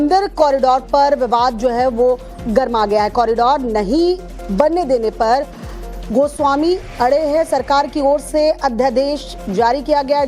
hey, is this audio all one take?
no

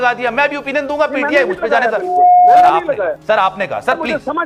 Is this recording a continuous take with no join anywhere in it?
yes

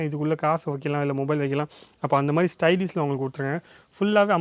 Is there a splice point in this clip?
no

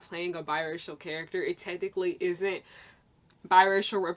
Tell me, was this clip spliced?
no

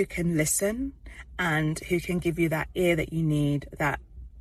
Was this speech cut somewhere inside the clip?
no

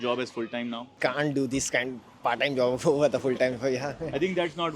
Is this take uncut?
no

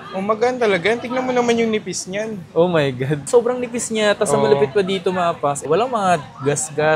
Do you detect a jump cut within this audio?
no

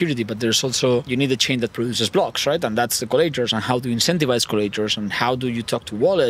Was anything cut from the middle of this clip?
yes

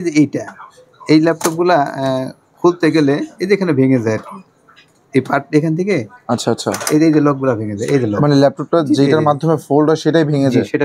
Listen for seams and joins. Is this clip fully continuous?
yes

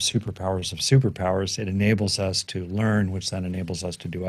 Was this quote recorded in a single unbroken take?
yes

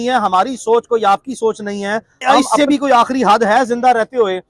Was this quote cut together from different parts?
yes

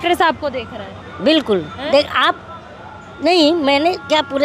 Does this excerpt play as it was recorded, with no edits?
yes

